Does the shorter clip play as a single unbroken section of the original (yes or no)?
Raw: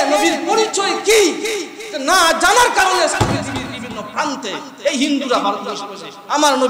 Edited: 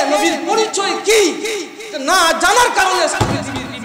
yes